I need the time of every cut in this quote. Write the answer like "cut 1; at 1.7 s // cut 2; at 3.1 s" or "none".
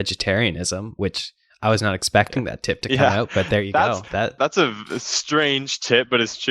cut 1; at 4.4 s